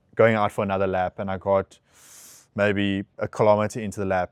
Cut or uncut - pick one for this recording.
uncut